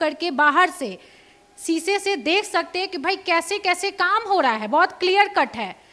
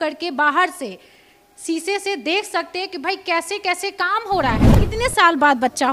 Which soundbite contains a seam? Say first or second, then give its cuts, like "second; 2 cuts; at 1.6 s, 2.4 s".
second; 1 cut; at 4.7 s